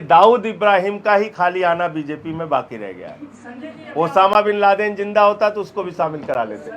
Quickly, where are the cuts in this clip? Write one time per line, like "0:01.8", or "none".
none